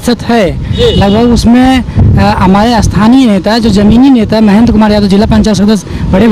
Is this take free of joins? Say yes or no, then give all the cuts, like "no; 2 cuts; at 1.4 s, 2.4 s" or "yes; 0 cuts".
yes; 0 cuts